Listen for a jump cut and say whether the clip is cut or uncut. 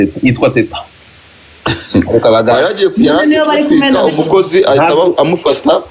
uncut